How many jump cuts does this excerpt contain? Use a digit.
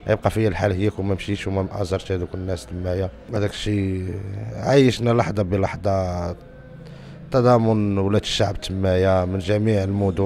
1